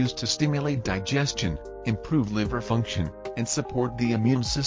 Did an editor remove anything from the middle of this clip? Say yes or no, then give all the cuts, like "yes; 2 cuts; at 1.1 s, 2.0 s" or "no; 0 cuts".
no; 0 cuts